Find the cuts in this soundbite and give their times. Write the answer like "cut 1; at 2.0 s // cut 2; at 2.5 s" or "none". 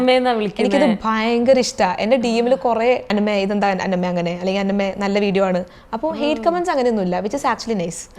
cut 1; at 3.0 s